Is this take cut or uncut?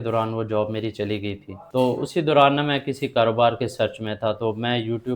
cut